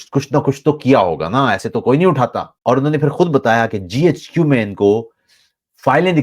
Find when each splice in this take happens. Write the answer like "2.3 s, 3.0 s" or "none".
2.5 s